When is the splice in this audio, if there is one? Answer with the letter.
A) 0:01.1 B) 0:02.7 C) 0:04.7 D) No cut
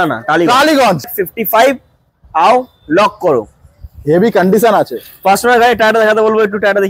A